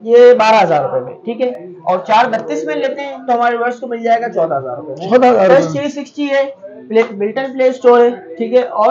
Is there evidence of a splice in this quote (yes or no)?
no